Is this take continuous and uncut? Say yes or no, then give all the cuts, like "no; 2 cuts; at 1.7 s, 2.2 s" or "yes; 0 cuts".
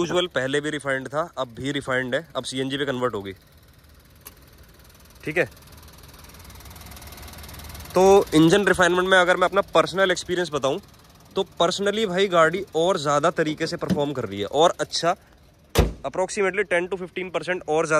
yes; 0 cuts